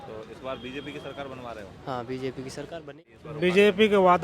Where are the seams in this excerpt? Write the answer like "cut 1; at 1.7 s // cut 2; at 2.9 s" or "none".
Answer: cut 1; at 2.9 s